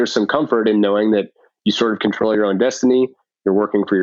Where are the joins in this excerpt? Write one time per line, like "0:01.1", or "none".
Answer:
none